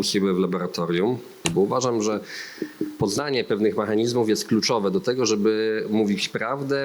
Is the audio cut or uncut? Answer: cut